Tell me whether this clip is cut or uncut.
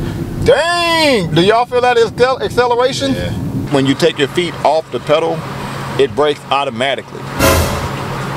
cut